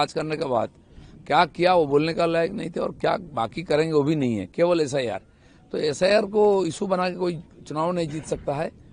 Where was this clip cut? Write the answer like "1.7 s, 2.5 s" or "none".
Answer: none